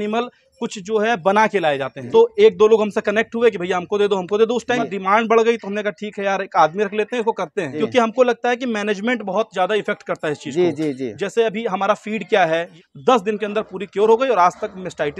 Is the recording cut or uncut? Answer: cut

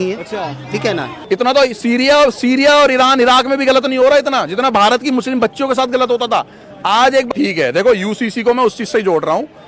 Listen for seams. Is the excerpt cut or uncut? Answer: cut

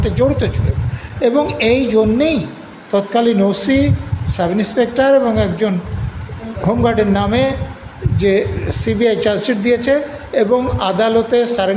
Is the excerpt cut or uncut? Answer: uncut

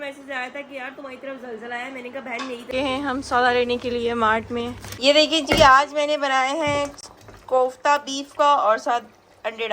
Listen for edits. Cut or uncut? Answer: cut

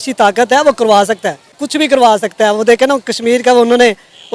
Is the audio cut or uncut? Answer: cut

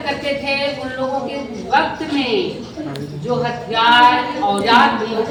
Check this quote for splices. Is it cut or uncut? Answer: uncut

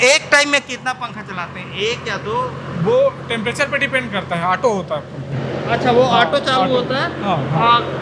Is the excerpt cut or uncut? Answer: uncut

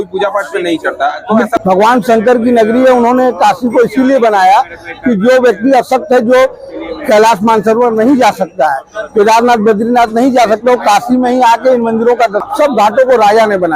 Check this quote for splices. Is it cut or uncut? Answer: cut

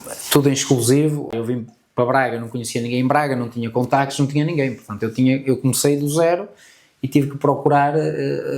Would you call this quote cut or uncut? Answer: cut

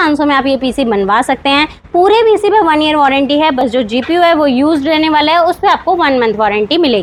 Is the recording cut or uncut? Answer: uncut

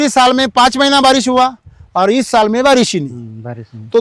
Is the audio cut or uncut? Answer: uncut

